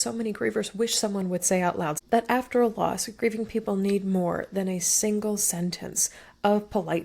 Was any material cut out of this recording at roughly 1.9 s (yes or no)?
yes